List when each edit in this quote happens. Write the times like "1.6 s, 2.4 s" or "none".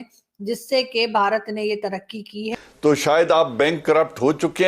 2.5 s